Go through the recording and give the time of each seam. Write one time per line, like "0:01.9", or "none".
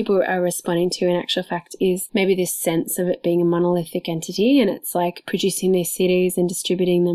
none